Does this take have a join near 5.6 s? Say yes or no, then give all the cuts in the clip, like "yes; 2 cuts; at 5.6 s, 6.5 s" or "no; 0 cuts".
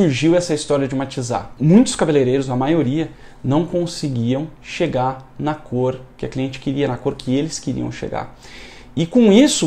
no; 1 cut; at 1.5 s